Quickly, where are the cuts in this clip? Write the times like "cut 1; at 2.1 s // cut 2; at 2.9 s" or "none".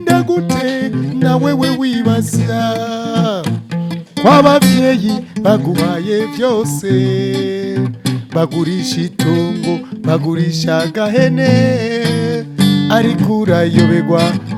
none